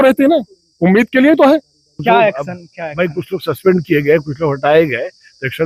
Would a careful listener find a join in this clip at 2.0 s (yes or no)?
yes